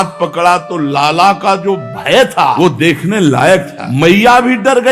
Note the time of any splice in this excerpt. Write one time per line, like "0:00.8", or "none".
0:02.5
0:03.8

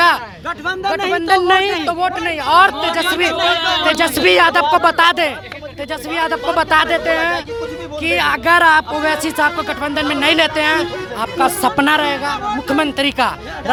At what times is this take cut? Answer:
none

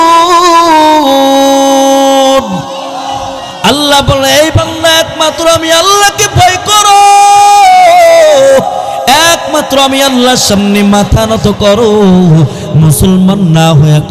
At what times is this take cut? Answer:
none

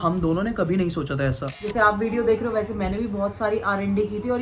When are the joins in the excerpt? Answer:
0:01.5

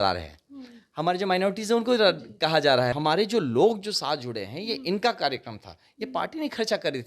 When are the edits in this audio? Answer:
0:03.0

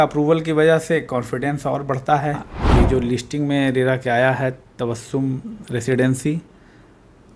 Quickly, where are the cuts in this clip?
0:02.5

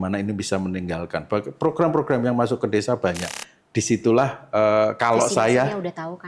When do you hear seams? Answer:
0:03.5

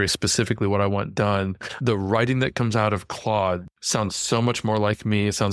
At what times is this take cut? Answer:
0:03.7

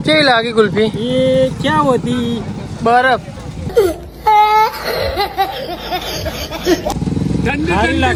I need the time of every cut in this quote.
none

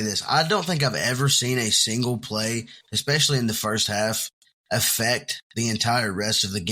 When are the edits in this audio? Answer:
none

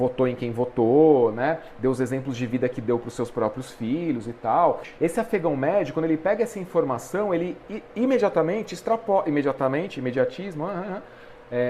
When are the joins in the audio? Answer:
0:04.9

